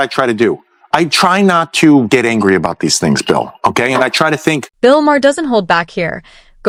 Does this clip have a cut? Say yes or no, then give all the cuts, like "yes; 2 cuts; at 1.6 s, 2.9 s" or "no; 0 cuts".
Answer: no; 0 cuts